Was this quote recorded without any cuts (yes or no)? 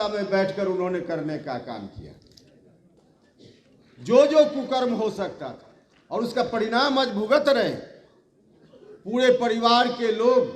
yes